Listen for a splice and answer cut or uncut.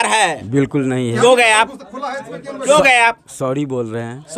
uncut